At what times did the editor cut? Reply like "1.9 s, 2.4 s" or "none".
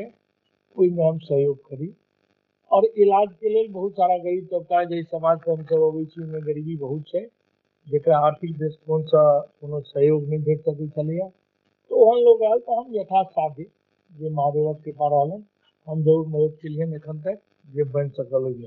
17.5 s